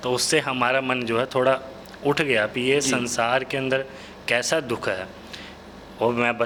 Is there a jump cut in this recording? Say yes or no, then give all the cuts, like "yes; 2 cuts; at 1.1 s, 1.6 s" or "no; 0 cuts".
no; 0 cuts